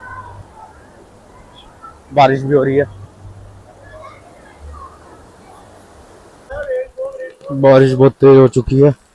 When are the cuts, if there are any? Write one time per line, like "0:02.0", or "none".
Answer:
0:06.4

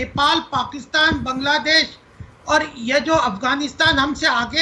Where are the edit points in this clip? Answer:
none

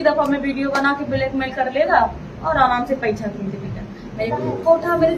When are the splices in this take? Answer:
0:04.3

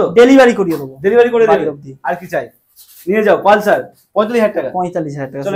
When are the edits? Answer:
none

